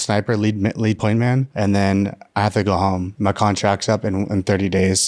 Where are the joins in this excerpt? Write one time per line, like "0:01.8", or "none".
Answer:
0:01.5
0:03.1